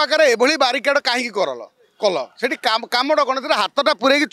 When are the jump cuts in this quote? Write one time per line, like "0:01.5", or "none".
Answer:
none